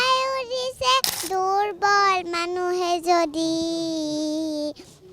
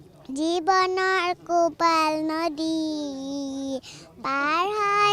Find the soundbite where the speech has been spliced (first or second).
first